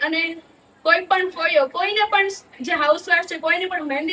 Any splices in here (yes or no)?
no